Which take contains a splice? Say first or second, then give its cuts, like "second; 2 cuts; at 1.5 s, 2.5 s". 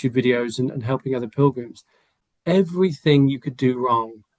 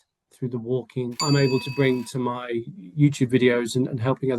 second; 1 cut; at 1.2 s